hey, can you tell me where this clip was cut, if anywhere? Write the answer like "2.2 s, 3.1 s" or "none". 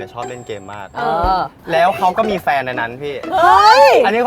1.6 s